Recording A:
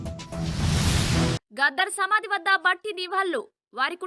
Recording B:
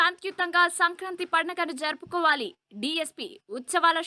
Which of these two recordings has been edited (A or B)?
A